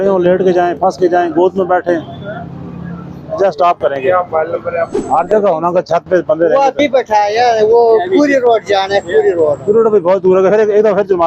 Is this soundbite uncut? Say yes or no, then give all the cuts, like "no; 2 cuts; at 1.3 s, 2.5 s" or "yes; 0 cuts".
yes; 0 cuts